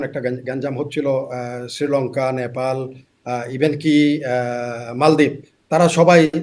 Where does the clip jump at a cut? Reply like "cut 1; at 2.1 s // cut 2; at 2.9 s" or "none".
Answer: none